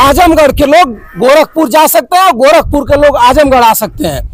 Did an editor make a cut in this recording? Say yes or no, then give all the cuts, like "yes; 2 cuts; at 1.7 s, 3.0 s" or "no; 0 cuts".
no; 0 cuts